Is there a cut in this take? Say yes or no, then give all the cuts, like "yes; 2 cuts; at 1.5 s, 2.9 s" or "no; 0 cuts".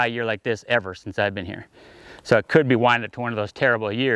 no; 0 cuts